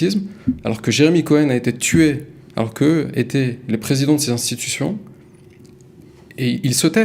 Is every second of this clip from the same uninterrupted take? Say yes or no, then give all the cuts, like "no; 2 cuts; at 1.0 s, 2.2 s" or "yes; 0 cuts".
yes; 0 cuts